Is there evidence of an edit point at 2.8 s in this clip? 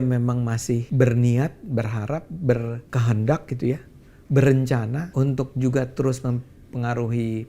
yes; 3 cuts; at 0.9 s, 2.8 s, 5.0 s

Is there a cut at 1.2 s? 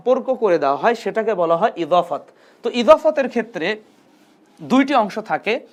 no; 0 cuts

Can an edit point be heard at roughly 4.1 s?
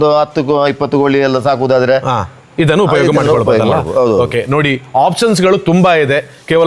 no; 0 cuts

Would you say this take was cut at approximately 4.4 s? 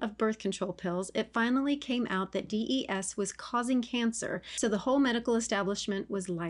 yes; 1 cut; at 4.4 s

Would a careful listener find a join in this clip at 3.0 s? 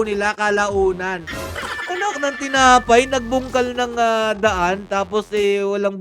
no; 1 cut; at 1.2 s

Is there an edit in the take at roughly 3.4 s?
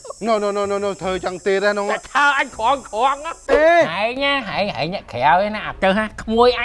yes; 1 cut; at 3.4 s

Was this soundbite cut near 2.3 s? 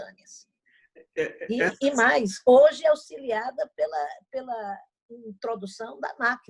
no; 0 cuts

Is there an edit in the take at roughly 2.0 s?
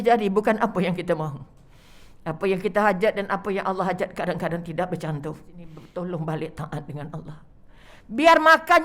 no; 1 cut; at 5.8 s

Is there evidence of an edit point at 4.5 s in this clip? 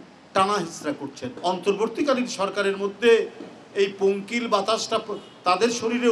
no; 1 cut; at 1.3 s

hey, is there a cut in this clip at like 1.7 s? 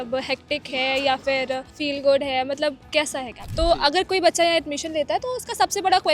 yes; 2 cuts; at 1.7 s, 3.5 s

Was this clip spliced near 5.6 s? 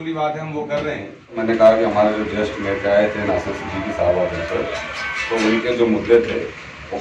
no; 1 cut; at 1.4 s

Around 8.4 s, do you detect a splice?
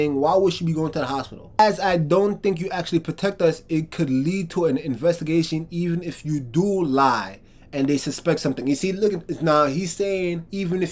no; 1 cut; at 1.6 s

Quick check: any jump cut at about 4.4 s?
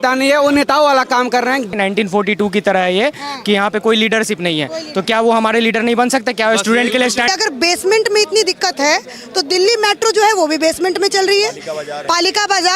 no; 2 cuts; at 1.7 s, 7.3 s

